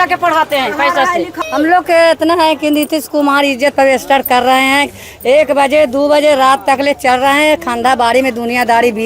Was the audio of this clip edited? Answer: yes; 1 cut; at 1.3 s

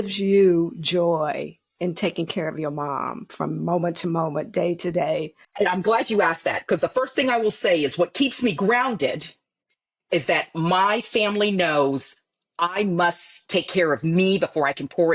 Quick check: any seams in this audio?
yes; 1 cut; at 5.4 s

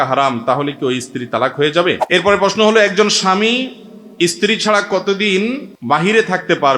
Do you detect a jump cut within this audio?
yes; 2 cuts; at 2.0 s, 5.7 s

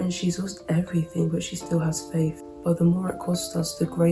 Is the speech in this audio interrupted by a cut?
yes; 1 cut; at 2.5 s

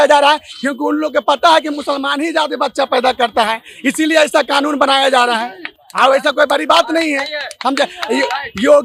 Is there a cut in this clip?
no; 0 cuts

